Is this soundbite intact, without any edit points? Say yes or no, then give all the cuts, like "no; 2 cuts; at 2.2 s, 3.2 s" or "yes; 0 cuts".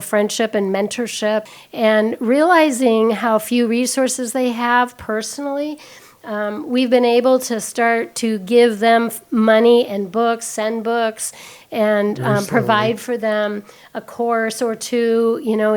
no; 1 cut; at 1.5 s